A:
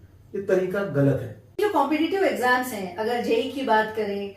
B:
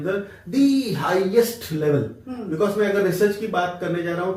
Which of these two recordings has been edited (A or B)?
A